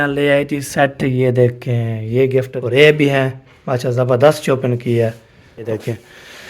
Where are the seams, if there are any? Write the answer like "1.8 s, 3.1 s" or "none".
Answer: 2.5 s, 5.7 s